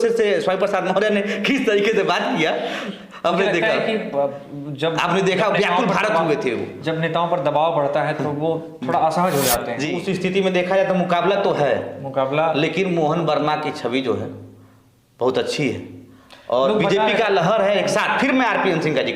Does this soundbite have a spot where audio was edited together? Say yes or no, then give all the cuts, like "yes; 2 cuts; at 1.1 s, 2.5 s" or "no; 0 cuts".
yes; 1 cut; at 9.9 s